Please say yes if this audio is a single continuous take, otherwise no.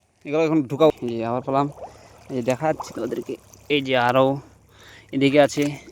no